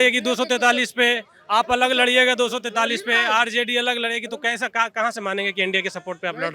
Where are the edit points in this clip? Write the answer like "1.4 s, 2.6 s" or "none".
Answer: none